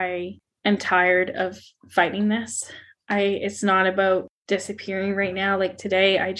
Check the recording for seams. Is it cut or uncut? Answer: uncut